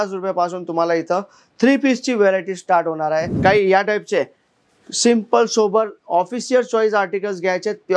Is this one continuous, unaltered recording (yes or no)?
no